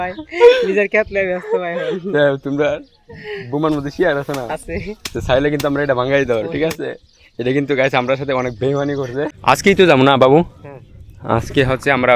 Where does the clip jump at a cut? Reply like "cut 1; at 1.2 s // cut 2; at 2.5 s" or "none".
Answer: cut 1; at 9.3 s